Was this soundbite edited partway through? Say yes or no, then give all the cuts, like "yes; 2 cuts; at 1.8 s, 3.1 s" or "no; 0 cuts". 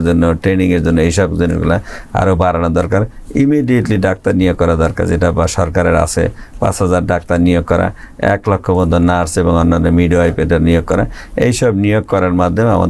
no; 0 cuts